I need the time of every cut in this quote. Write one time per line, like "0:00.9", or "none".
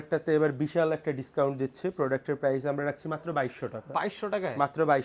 none